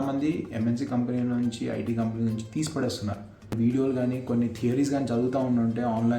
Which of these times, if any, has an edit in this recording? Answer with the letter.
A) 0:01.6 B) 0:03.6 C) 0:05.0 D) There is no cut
B